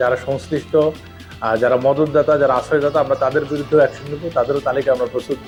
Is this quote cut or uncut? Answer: uncut